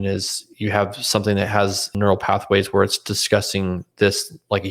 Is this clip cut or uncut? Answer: cut